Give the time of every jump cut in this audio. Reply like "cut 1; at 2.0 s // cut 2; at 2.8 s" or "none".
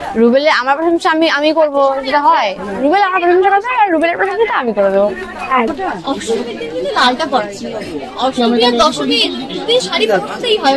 cut 1; at 5.7 s